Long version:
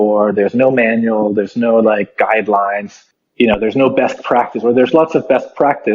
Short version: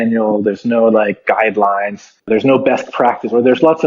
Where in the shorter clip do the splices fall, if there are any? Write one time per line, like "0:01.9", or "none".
0:02.3